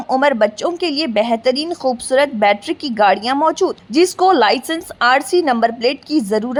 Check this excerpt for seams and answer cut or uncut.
uncut